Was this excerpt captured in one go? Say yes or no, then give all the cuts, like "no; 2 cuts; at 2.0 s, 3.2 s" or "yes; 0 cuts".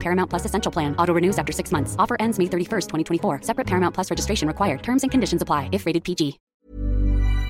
no; 1 cut; at 6.5 s